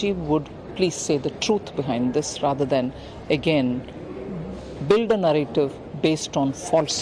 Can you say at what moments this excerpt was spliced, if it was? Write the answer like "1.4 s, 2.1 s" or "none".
none